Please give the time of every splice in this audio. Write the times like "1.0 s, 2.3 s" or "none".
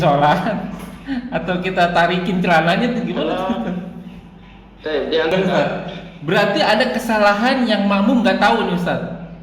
5.3 s